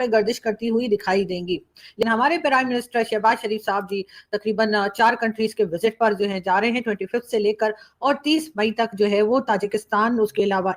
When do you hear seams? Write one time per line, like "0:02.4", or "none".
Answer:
0:01.9